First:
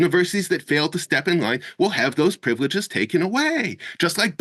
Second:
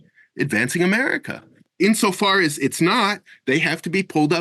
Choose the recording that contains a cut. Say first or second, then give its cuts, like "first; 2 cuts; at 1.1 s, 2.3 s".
second; 1 cut; at 1.6 s